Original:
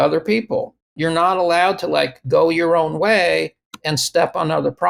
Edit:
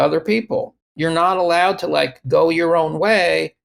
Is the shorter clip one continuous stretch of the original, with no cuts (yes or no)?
yes